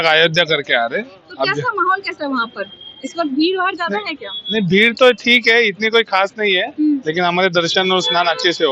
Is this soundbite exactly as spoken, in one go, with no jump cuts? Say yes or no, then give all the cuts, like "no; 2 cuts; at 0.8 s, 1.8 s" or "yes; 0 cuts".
yes; 0 cuts